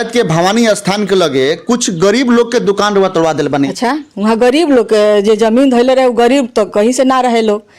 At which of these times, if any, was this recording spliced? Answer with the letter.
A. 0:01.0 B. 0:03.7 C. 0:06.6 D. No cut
B